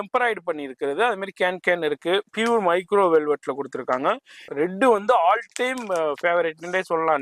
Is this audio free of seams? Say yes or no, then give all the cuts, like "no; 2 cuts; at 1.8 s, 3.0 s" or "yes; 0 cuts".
no; 1 cut; at 4.4 s